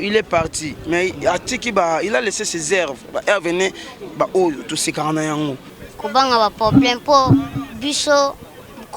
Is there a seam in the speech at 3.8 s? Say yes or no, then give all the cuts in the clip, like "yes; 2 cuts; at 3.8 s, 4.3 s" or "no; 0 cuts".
no; 1 cut; at 5.7 s